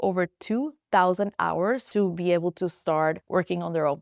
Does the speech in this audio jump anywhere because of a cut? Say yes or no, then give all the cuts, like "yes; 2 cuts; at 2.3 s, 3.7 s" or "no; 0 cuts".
yes; 2 cuts; at 1.9 s, 3.2 s